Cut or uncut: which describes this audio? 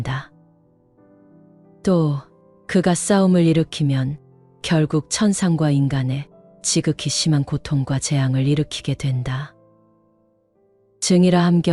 uncut